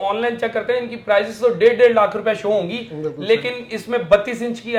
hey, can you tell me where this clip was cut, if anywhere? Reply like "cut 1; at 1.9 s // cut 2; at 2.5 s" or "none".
none